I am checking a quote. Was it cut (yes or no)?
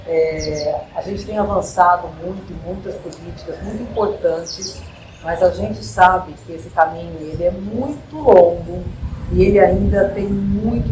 no